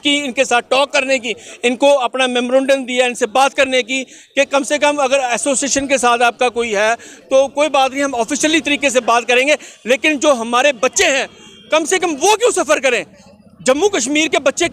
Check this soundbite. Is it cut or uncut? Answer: uncut